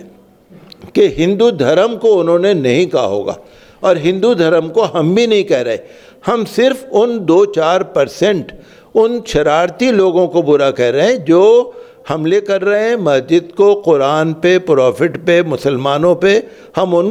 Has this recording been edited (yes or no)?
no